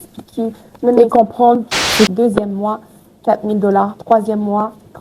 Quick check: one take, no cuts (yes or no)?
no